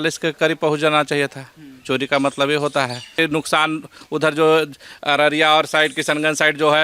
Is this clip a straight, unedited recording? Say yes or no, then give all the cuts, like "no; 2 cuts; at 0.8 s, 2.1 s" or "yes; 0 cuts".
no; 1 cut; at 3.1 s